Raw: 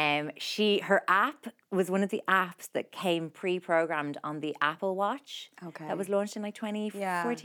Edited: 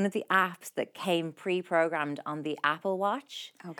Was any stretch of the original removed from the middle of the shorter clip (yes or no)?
no